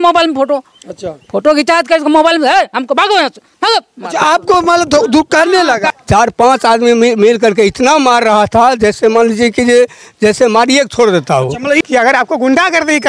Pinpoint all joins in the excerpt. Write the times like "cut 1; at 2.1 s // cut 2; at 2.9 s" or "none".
cut 1; at 5.9 s // cut 2; at 11.8 s